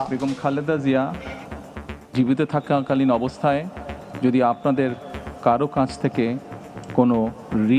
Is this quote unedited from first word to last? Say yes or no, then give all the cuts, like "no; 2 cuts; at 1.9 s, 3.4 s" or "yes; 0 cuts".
yes; 0 cuts